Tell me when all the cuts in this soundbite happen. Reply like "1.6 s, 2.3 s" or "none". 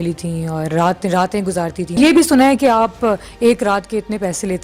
2.0 s